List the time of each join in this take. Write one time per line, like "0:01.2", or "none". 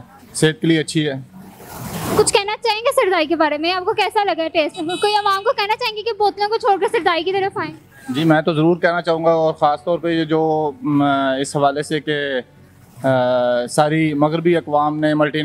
none